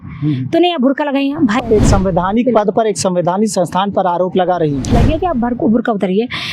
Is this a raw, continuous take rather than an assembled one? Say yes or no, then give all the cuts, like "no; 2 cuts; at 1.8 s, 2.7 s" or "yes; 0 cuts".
no; 2 cuts; at 1.6 s, 5.0 s